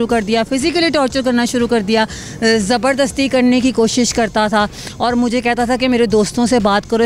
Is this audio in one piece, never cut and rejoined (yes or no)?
yes